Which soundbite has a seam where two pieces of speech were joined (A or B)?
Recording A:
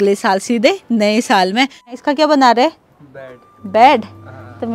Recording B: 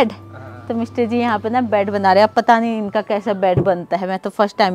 A